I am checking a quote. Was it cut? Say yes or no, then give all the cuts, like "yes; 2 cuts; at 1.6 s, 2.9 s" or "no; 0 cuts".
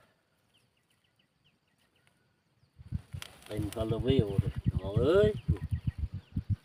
no; 0 cuts